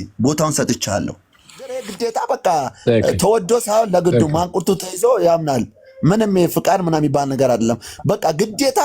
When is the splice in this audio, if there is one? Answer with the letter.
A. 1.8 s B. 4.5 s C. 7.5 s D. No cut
A